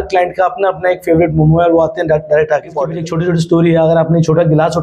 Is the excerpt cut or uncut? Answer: cut